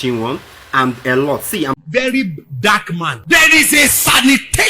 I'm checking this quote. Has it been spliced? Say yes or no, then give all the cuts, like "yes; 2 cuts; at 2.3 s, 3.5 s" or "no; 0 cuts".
yes; 1 cut; at 1.7 s